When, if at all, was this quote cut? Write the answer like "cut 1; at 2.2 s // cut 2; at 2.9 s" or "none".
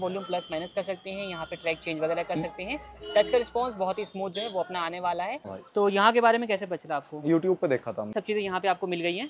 cut 1; at 5.6 s // cut 2; at 8.1 s